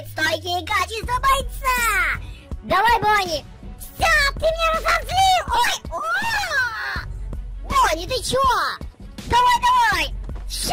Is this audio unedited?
yes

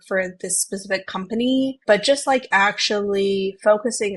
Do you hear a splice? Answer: yes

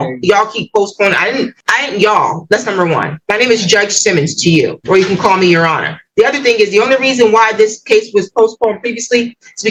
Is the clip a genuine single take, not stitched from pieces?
yes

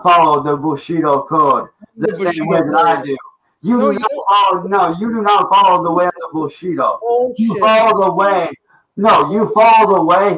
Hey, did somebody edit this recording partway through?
no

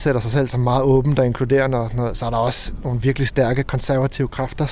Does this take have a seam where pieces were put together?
no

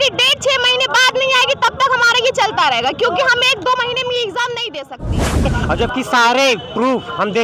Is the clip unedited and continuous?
no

